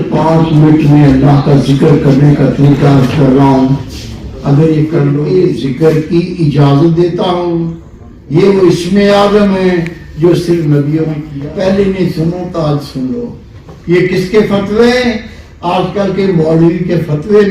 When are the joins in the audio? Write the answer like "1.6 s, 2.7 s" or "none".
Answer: 5.2 s, 11.2 s